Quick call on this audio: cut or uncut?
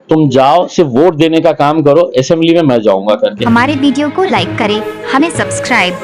cut